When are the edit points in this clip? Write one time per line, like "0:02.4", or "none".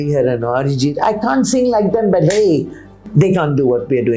0:03.0